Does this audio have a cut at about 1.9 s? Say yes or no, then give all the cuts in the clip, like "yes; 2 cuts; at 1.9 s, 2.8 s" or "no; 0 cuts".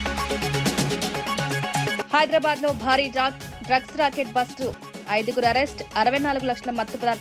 yes; 1 cut; at 1.9 s